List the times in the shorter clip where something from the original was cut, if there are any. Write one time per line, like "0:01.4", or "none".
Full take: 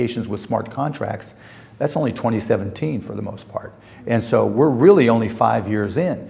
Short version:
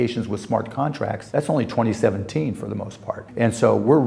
0:01.2
0:03.2